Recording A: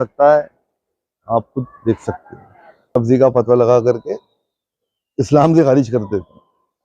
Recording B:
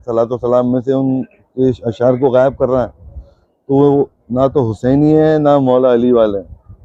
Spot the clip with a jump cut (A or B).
A